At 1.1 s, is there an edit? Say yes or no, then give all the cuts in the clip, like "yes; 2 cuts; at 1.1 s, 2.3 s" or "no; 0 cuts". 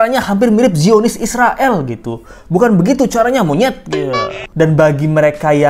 no; 1 cut; at 4.4 s